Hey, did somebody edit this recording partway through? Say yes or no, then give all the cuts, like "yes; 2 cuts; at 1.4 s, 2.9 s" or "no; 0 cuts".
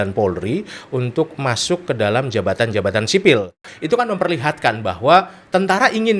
yes; 1 cut; at 3.7 s